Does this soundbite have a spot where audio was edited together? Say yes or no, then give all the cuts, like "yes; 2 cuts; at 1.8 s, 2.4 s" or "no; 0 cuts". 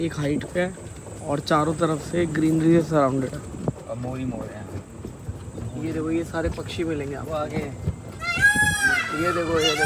no; 0 cuts